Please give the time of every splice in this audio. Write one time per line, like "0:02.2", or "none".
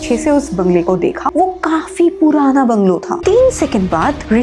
0:01.3
0:03.1